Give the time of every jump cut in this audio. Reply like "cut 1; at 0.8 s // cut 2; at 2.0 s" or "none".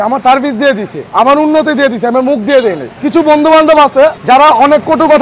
cut 1; at 1.0 s // cut 2; at 3.0 s